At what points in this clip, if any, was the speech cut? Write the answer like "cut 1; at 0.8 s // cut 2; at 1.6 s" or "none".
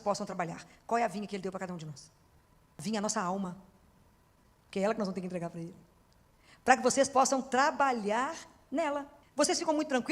cut 1; at 9.2 s